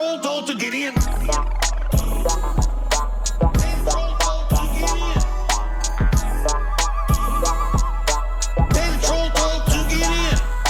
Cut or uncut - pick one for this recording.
uncut